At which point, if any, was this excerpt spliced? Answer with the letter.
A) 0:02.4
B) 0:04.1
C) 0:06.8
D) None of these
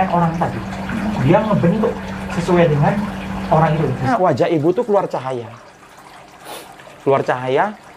B